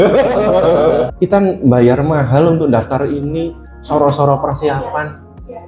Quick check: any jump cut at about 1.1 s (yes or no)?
yes